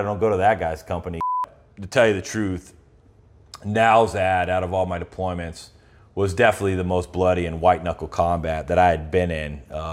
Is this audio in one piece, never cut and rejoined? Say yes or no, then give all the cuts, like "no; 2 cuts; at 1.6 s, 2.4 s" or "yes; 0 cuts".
no; 1 cut; at 1.3 s